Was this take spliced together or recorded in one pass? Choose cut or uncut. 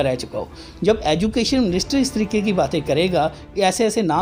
uncut